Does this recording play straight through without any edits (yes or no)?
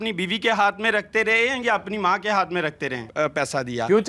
no